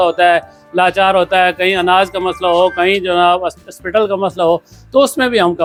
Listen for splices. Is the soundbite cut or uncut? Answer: uncut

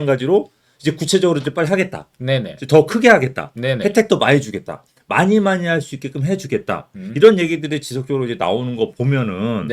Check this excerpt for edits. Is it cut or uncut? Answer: uncut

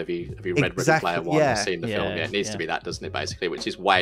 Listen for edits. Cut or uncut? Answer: uncut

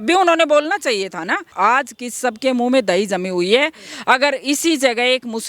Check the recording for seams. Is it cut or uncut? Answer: cut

